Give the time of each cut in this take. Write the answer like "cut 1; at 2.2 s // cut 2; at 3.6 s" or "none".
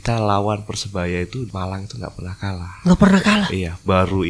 cut 1; at 1.5 s